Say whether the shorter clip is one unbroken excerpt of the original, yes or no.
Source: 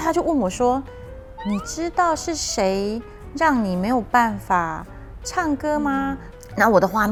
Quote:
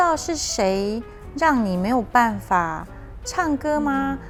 yes